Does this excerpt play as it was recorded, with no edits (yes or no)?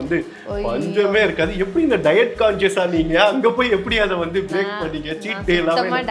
yes